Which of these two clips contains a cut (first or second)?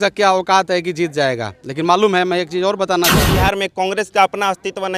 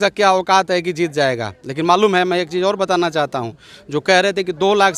first